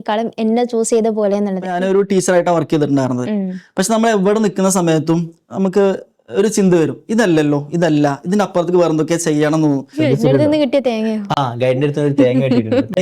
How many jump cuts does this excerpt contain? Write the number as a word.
two